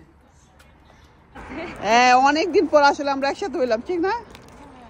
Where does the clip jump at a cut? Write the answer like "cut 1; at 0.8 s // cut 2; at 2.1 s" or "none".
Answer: cut 1; at 1.3 s